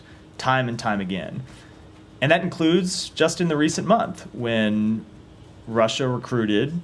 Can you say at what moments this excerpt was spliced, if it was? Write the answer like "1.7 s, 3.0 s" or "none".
none